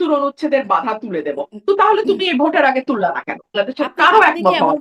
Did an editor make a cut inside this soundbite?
yes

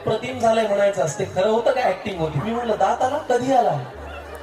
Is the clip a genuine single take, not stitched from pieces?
no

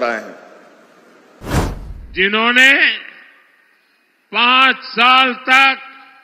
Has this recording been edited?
yes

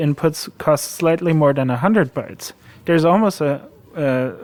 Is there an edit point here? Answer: no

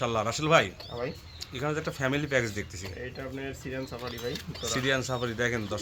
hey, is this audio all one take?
yes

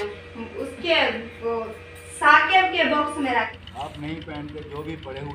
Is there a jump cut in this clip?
yes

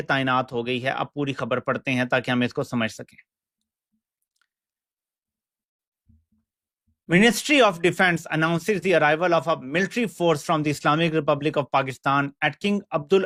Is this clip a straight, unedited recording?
yes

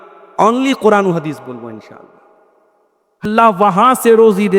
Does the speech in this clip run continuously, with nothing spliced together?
no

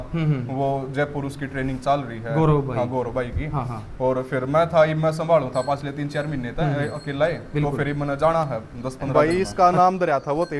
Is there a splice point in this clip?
yes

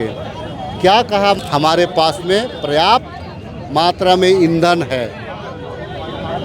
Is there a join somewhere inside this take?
yes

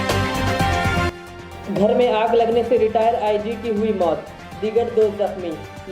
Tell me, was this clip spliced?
yes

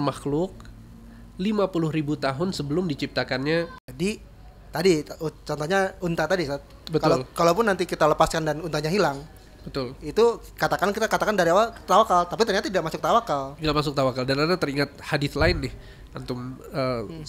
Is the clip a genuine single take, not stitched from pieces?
no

